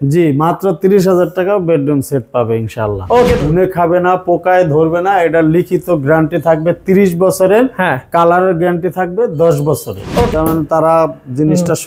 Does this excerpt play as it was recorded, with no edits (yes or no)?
no